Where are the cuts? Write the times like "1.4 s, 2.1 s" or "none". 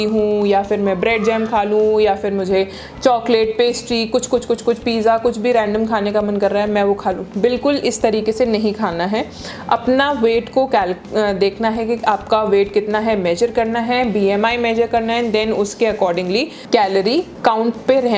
none